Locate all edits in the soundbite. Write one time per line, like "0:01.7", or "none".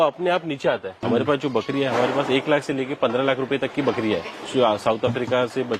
0:01.0
0:04.4